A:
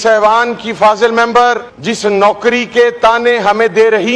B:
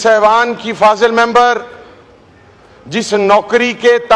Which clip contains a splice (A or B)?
A